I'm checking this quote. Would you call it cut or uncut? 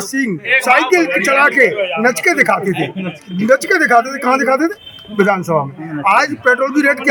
uncut